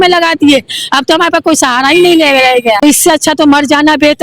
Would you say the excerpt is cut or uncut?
cut